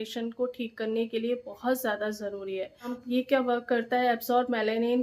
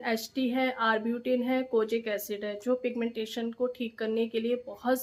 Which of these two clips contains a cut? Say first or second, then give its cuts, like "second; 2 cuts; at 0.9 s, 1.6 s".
first; 1 cut; at 3.0 s